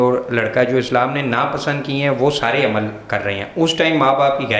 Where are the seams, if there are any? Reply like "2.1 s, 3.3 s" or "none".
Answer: none